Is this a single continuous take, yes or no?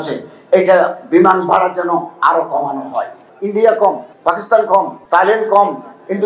no